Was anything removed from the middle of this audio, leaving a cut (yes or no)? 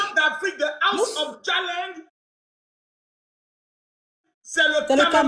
no